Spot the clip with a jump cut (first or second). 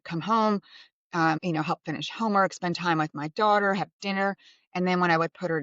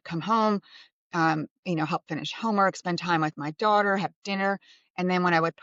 first